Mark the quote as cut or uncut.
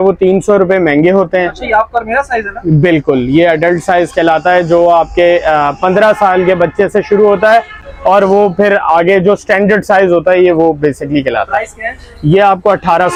uncut